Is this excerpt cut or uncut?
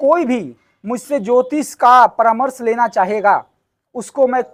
uncut